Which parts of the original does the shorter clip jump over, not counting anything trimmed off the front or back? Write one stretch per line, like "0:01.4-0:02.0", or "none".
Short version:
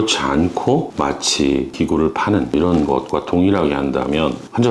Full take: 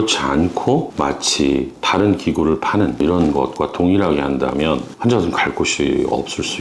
0:01.7-0:02.2